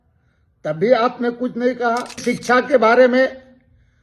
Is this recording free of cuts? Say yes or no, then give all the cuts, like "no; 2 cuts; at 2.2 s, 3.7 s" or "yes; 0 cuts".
no; 1 cut; at 2.2 s